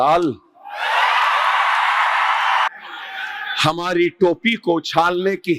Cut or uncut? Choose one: cut